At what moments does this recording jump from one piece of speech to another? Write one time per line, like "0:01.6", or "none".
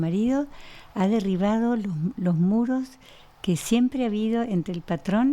none